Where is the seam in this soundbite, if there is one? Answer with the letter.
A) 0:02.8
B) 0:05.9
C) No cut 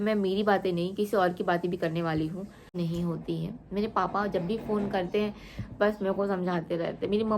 A